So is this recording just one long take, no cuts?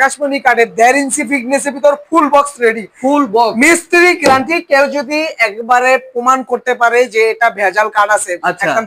yes; 0 cuts

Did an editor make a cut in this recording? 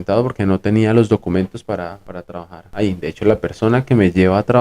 yes; 1 cut; at 2.2 s

